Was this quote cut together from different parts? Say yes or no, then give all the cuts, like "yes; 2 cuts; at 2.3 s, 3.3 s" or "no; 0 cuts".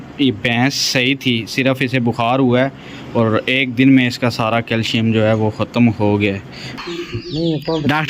yes; 1 cut; at 6.7 s